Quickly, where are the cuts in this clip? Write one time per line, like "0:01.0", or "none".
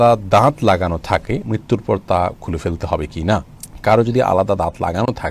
none